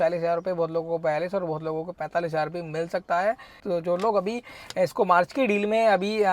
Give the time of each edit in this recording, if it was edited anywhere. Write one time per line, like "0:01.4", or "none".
0:03.5